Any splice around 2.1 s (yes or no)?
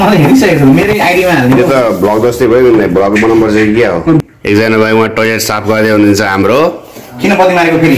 no